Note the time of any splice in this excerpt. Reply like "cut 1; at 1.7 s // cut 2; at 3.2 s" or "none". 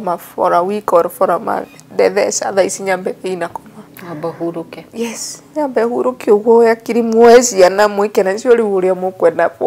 none